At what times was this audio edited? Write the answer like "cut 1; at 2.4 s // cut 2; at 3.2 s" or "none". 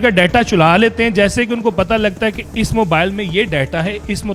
none